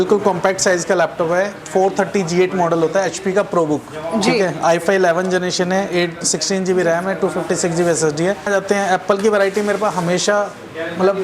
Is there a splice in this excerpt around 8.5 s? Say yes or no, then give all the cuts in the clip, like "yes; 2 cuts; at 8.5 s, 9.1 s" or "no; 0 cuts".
yes; 1 cut; at 8.5 s